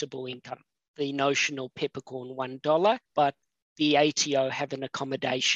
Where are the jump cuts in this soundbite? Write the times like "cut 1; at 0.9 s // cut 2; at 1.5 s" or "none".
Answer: cut 1; at 3.0 s